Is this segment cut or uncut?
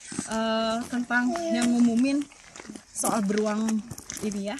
uncut